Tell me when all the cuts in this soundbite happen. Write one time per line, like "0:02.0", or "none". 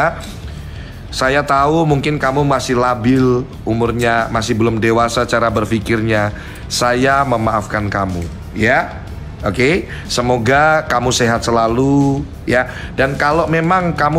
none